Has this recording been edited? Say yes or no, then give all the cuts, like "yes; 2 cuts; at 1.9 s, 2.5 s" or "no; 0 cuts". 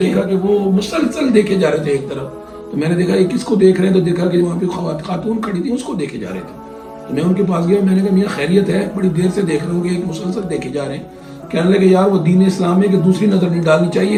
no; 0 cuts